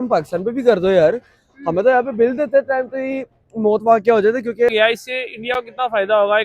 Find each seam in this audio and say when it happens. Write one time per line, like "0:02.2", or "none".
0:04.7